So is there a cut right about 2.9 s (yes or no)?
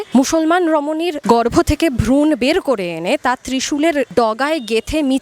no